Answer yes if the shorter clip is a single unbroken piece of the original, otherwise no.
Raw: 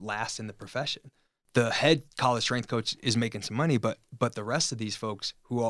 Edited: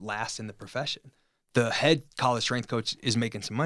yes